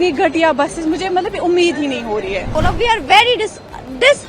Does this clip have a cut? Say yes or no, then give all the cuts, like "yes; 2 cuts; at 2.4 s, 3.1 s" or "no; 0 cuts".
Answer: yes; 1 cut; at 2.5 s